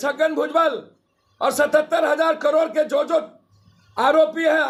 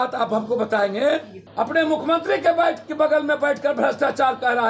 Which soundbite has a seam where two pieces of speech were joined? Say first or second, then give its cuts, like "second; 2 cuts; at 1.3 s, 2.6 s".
second; 1 cut; at 1.4 s